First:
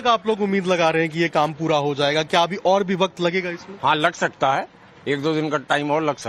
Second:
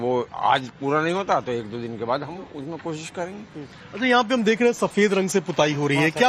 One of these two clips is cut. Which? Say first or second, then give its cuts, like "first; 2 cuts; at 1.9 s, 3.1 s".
first; 1 cut; at 3.5 s